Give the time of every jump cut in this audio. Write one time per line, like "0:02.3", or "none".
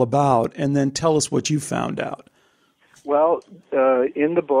none

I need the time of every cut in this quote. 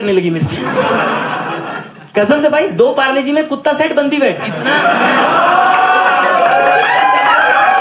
none

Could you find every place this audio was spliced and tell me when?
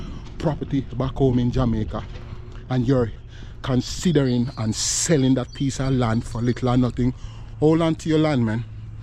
0:03.2

